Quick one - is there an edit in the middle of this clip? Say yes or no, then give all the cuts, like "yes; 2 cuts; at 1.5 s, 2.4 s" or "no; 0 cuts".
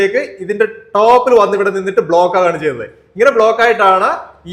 no; 0 cuts